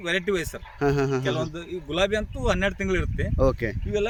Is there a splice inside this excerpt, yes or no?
no